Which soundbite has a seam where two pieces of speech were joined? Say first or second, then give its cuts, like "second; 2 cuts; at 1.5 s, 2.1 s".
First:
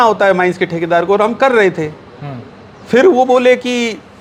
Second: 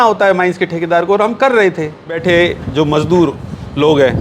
second; 1 cut; at 2.2 s